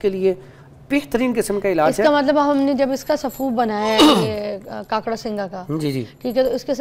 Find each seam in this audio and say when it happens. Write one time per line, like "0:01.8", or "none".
none